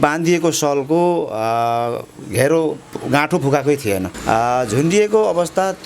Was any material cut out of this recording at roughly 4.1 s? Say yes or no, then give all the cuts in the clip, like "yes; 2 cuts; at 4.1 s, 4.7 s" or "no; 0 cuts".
yes; 1 cut; at 4.1 s